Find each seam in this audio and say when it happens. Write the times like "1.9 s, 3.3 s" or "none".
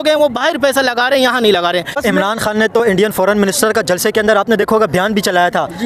none